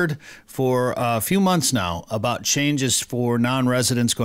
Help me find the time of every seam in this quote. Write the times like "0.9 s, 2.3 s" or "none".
none

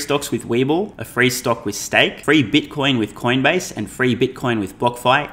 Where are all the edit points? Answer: 1.0 s, 2.2 s

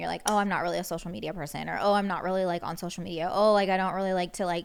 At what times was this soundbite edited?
none

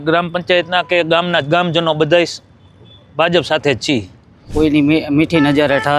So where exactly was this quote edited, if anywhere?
4.5 s

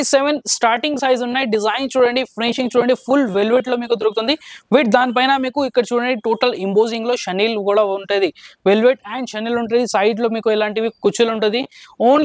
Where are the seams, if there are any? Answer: none

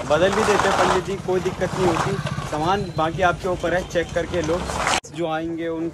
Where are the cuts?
5.0 s

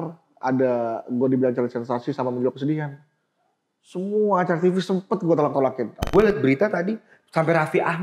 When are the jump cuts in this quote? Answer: 6.1 s

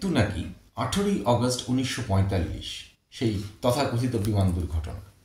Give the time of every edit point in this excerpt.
none

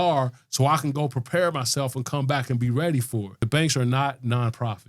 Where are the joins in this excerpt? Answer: 3.4 s

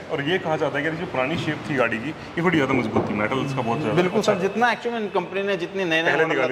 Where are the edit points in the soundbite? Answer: none

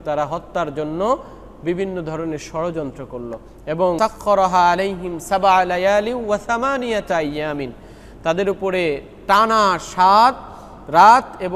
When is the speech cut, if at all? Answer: 4.0 s

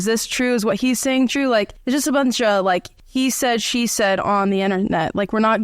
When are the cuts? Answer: 1.8 s, 3.0 s

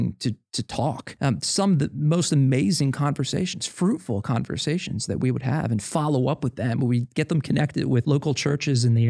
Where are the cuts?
1.1 s, 8.0 s

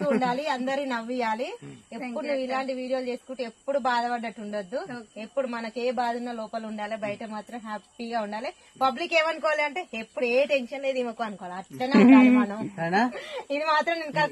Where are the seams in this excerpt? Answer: none

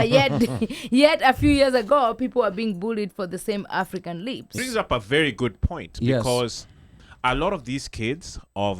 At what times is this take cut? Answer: 4.6 s

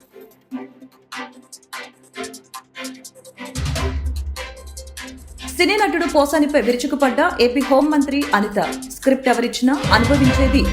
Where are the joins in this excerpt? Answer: 2.9 s

